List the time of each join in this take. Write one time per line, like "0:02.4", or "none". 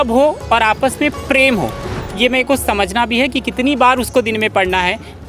0:02.0